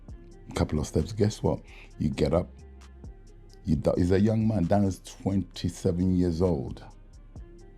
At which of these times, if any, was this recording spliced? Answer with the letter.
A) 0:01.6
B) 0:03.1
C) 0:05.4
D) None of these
B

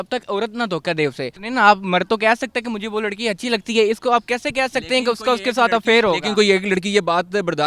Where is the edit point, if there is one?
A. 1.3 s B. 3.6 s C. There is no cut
A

